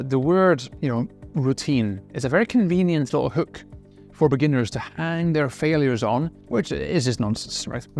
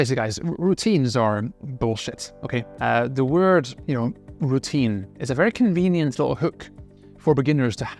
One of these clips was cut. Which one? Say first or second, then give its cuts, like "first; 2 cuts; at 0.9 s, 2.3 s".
first; 1 cut; at 6.4 s